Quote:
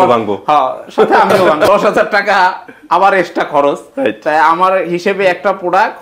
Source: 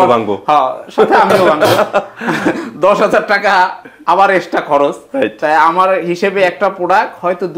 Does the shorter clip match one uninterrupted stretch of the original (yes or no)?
no